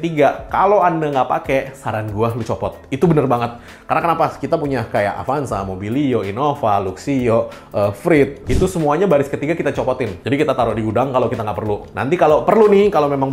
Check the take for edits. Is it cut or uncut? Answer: uncut